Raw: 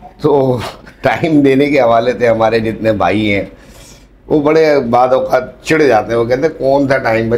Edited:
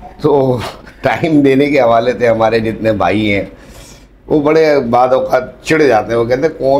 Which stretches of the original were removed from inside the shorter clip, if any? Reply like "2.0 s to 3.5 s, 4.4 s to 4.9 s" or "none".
none